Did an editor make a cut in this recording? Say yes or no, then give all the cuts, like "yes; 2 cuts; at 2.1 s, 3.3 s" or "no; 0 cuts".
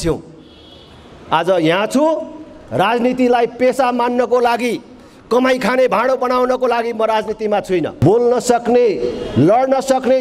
yes; 1 cut; at 8.0 s